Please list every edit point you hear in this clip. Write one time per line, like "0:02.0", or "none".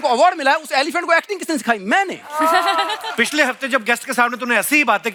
none